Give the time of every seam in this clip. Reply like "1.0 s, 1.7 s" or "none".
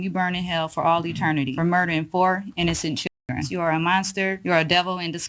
1.5 s, 3.5 s, 4.4 s